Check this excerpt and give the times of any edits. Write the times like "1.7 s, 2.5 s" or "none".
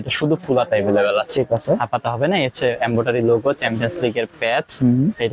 none